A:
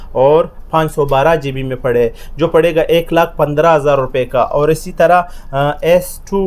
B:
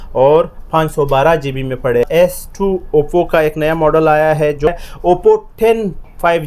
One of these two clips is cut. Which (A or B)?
B